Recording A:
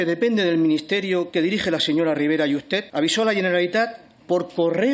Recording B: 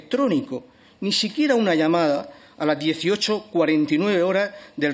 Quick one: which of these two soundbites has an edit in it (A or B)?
A